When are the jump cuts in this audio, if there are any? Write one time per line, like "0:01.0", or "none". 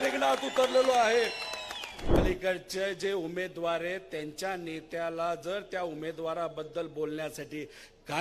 0:02.1